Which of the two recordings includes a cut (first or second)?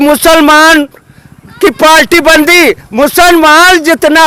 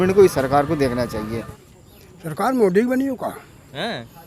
second